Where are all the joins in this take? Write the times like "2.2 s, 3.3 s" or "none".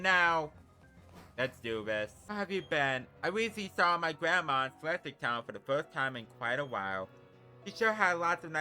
2.2 s